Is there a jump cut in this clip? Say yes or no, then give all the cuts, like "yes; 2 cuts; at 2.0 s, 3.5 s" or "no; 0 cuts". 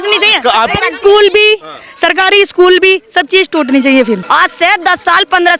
yes; 1 cut; at 4.2 s